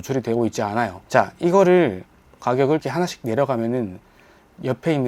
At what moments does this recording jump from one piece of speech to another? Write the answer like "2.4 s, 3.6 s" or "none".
1.0 s